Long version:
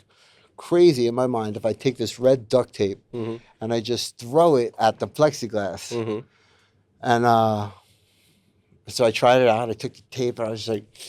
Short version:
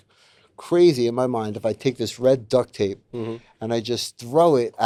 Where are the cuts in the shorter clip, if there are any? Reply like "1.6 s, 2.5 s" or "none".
none